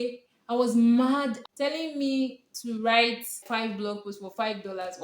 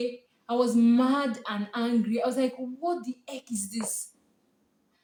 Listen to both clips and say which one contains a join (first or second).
first